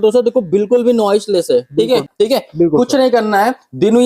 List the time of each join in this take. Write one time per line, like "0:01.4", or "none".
0:02.1